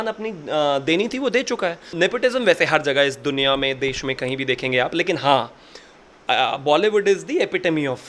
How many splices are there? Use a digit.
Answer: 1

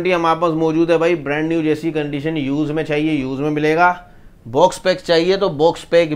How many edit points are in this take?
0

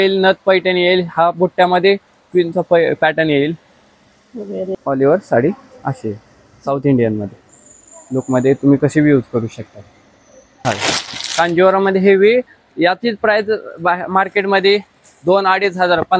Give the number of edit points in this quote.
2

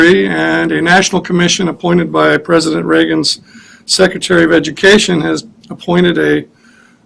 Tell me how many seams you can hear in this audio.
1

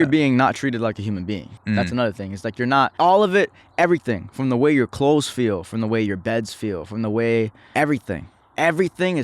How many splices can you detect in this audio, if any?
3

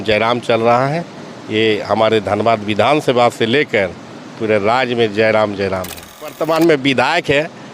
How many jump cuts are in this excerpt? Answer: 1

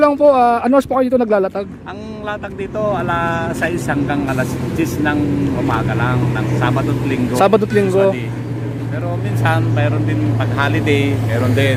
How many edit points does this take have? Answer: 0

